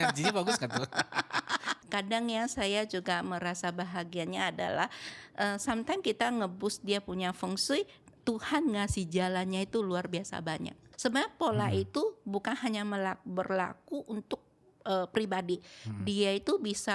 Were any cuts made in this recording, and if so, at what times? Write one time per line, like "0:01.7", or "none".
0:01.7
0:10.8